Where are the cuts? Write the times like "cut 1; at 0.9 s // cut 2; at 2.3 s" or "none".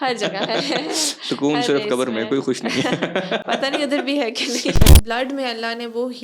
cut 1; at 4.9 s